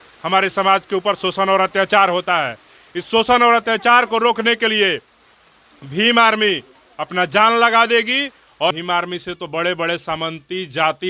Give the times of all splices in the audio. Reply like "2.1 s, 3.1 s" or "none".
8.7 s